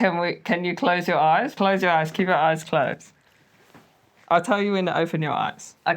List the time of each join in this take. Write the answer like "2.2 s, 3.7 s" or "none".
1.5 s